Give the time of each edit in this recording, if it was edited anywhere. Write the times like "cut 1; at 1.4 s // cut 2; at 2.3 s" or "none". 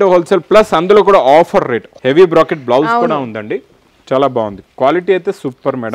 none